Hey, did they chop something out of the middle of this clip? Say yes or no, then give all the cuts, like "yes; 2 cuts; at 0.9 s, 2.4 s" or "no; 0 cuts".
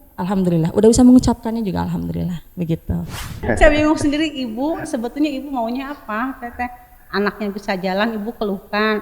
yes; 1 cut; at 3.4 s